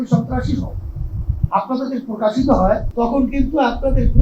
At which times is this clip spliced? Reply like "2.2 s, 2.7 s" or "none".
2.9 s